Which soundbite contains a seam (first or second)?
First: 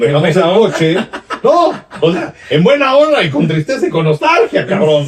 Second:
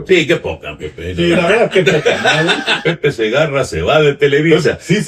second